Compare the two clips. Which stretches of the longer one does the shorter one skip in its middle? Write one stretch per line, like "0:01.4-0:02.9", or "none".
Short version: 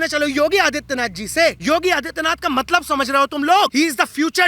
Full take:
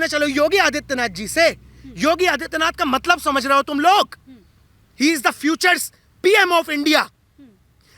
0:01.6-0:01.9
0:04.1-0:05.0